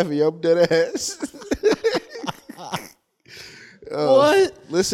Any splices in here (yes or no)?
no